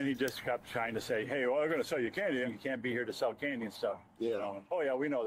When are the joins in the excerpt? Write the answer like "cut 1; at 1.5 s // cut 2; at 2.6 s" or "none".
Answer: cut 1; at 2.5 s